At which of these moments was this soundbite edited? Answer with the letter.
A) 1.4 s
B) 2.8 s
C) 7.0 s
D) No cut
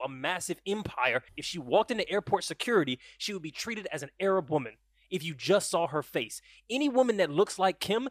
A